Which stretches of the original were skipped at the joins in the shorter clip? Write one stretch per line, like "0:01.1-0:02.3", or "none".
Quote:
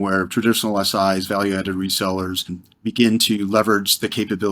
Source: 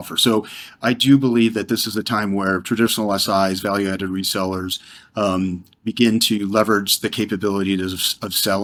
0:05.0-0:05.7